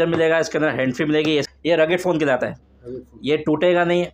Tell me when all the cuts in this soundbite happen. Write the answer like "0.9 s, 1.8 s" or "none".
1.5 s